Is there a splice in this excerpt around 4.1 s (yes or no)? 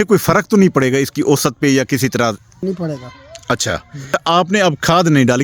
yes